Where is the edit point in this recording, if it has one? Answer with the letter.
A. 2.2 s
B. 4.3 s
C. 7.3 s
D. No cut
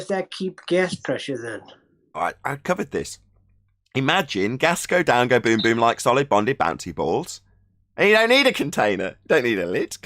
A